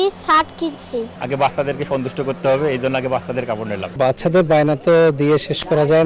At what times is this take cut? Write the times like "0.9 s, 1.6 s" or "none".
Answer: 1.1 s, 3.8 s